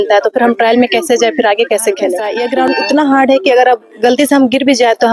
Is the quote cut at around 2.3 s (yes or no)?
yes